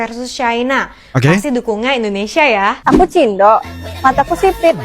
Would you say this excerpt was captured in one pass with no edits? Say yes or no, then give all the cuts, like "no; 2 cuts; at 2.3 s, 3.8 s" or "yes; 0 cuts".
no; 1 cut; at 2.8 s